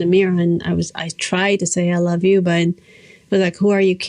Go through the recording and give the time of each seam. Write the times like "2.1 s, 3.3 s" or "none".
none